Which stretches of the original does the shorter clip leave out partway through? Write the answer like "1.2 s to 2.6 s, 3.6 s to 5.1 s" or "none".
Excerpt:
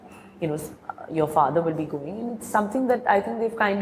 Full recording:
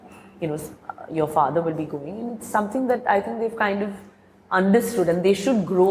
none